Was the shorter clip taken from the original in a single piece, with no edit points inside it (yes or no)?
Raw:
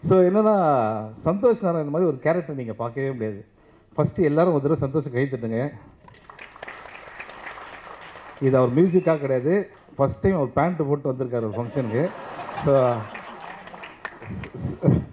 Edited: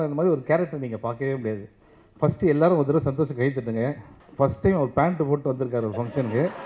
no